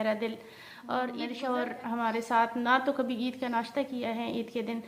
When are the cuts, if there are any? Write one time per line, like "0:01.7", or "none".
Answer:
0:01.2